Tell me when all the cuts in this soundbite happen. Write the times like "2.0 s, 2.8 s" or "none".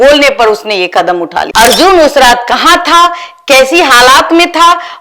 1.4 s